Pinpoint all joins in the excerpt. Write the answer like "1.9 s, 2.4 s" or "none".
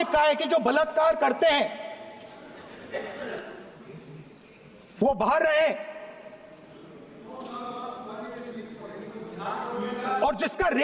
none